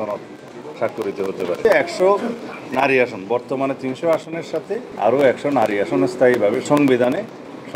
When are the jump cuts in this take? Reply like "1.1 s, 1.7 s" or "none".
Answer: 1.6 s, 4.9 s, 6.6 s